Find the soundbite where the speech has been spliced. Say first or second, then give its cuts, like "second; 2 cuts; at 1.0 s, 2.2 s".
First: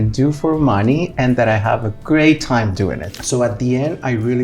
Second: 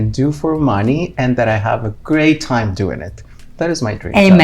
first; 1 cut; at 3.1 s